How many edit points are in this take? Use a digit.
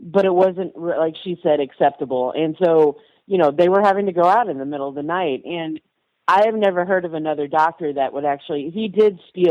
0